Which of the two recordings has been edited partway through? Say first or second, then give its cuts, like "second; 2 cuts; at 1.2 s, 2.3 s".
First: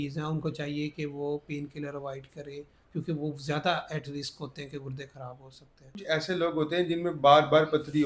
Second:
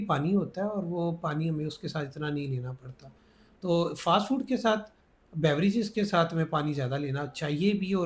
first; 1 cut; at 6.0 s